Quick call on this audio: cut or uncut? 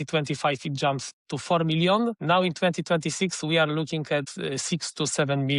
cut